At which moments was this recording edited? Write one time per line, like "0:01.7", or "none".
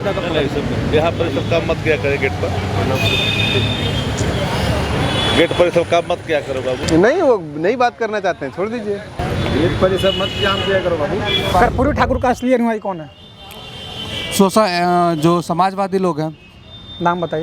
0:06.8
0:09.2
0:11.5